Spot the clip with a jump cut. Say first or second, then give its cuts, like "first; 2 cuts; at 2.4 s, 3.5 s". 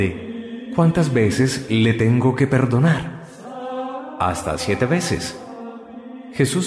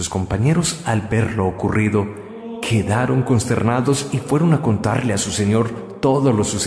second; 1 cut; at 3.3 s